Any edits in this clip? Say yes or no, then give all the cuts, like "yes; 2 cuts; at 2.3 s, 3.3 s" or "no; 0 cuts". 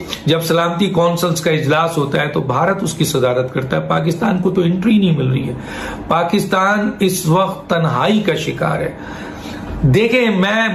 no; 0 cuts